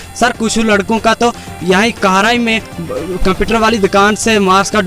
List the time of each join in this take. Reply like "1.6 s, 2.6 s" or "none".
none